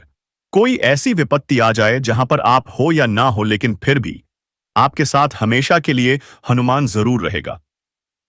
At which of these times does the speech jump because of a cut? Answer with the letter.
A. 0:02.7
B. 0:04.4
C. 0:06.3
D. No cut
D